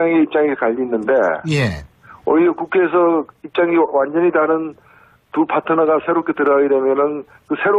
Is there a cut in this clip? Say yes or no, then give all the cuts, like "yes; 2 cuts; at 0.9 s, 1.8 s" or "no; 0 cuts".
yes; 1 cut; at 2.8 s